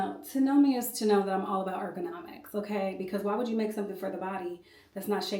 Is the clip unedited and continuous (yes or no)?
yes